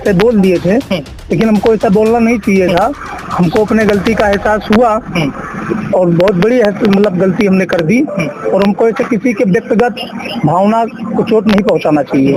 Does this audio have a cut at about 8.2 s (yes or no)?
no